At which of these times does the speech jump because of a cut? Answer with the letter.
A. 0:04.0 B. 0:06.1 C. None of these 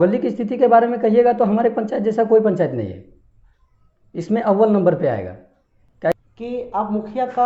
B